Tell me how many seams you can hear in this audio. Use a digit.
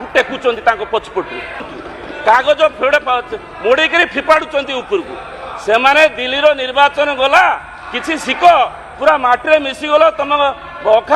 1